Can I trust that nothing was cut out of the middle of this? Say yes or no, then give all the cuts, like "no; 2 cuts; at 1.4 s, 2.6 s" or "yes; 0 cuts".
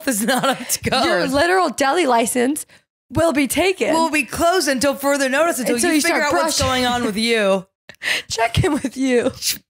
yes; 0 cuts